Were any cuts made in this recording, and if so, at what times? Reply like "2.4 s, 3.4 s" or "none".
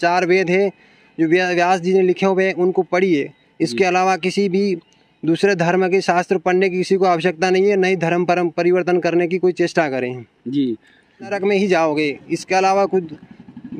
11.3 s